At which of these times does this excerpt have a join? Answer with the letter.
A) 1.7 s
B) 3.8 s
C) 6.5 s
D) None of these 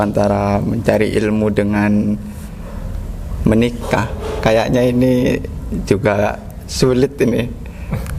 D